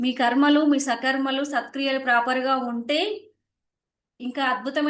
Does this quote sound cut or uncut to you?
uncut